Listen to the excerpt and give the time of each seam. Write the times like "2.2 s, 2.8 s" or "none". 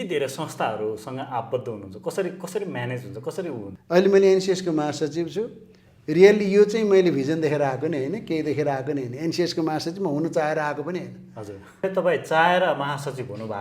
3.7 s, 11.8 s